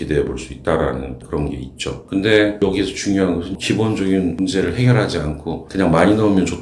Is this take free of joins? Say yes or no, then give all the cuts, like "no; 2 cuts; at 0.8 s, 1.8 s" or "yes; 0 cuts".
no; 2 cuts; at 3.5 s, 5.7 s